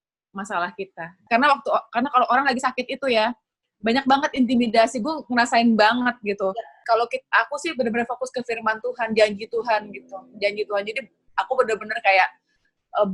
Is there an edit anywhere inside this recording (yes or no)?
yes